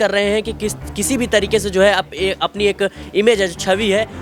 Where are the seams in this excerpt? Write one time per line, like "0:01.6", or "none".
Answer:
0:01.1